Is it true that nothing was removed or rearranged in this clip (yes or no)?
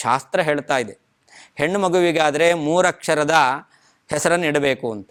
yes